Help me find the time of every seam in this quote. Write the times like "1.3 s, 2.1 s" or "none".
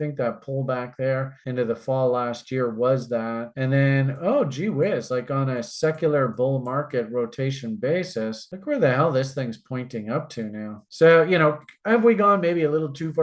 none